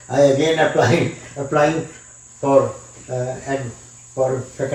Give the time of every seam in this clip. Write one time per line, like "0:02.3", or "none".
none

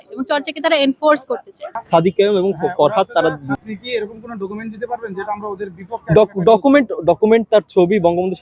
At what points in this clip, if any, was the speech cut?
0:01.7

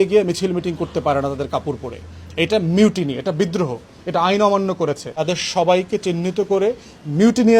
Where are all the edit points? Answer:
0:05.1

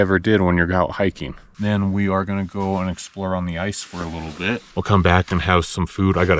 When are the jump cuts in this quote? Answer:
0:01.5
0:04.6

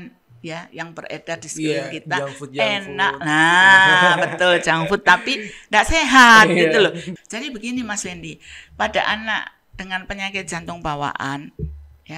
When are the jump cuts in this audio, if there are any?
0:07.1

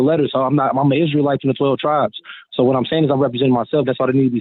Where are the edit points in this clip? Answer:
none

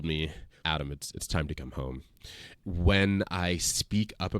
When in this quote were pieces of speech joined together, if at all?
0:02.5

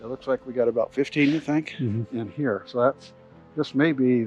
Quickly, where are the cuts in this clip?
none

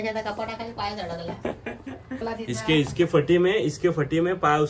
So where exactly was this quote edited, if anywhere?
0:02.2

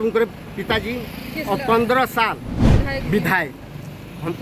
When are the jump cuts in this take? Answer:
0:02.6

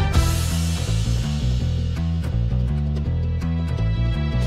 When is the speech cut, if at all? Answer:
none

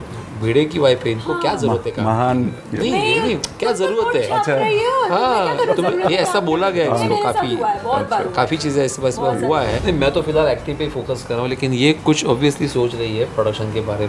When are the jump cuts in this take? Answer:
0:09.7

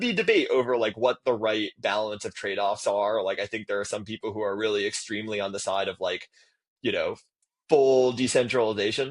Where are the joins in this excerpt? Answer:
none

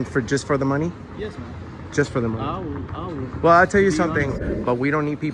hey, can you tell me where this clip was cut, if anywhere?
0:04.4

